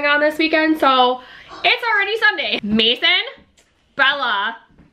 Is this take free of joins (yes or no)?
no